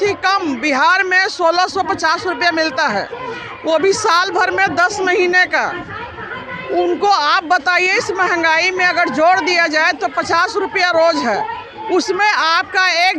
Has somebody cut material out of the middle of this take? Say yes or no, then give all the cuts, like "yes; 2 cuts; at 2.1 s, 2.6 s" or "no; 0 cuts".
no; 0 cuts